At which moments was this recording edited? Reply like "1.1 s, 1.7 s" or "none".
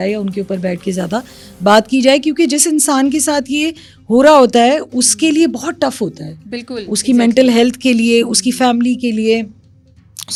none